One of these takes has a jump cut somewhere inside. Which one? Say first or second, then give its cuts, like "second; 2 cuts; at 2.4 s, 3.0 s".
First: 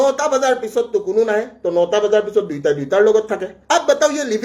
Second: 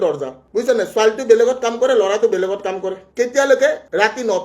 second; 1 cut; at 3.0 s